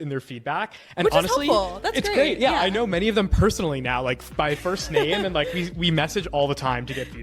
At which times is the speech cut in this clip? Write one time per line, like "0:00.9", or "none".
none